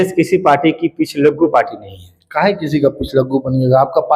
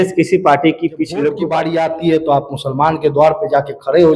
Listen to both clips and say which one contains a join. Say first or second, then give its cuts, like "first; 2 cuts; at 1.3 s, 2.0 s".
second; 1 cut; at 1.4 s